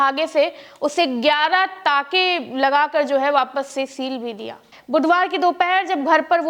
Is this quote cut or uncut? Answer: cut